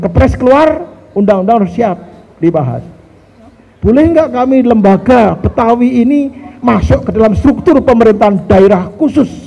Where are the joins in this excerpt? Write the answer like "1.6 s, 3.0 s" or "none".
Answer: 3.6 s